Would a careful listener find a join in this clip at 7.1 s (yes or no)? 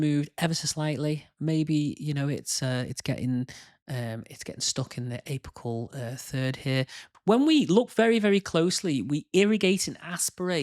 yes